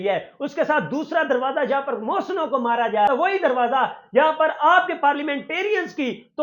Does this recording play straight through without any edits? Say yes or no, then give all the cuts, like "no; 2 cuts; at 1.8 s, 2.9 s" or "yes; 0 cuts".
no; 1 cut; at 3.1 s